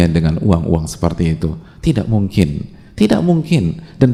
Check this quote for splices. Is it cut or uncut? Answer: uncut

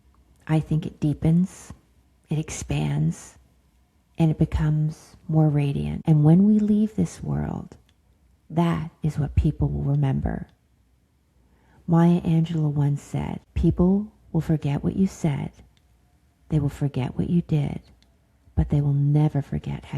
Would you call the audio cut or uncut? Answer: cut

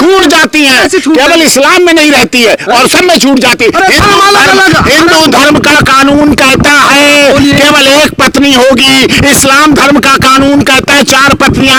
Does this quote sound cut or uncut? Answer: uncut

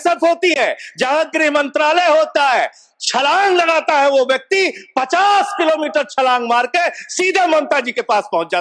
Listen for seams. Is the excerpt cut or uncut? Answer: uncut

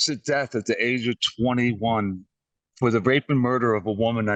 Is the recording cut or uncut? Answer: uncut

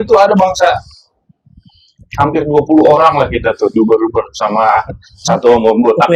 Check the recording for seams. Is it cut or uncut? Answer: uncut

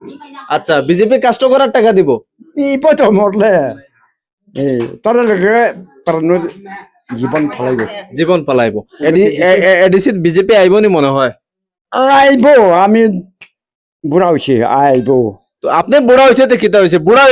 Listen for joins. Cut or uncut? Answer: cut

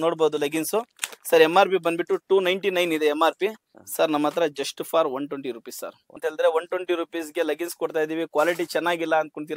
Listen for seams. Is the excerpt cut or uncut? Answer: cut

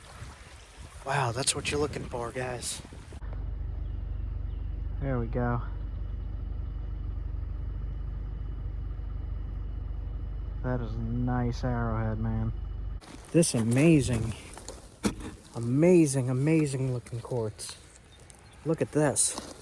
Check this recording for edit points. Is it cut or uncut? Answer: cut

